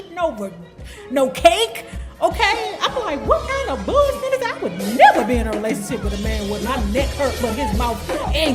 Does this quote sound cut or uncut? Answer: uncut